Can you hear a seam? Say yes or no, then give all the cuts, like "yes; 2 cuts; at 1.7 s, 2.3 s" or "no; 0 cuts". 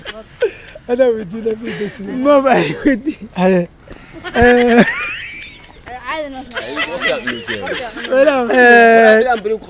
no; 0 cuts